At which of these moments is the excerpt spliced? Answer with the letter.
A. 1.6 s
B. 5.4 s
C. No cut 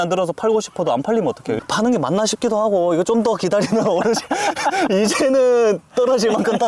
A